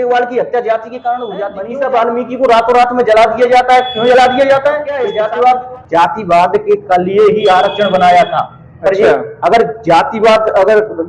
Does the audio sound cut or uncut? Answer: cut